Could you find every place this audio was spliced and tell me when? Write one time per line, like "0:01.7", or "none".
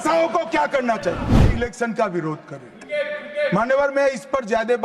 0:01.5